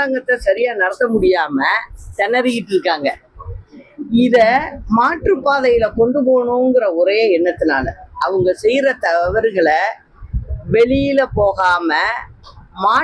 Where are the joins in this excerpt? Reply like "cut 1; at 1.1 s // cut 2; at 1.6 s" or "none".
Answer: none